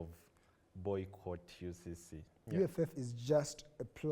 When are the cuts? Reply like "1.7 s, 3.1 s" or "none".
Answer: 2.3 s